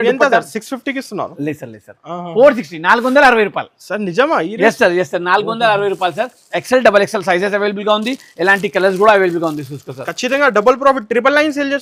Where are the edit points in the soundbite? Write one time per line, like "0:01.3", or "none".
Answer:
none